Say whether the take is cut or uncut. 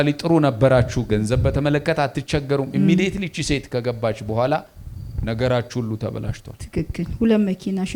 uncut